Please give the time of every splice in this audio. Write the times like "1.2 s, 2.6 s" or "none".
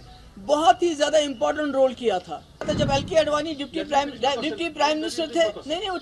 2.7 s